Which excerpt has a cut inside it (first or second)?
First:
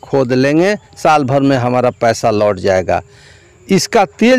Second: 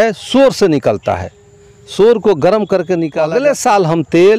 second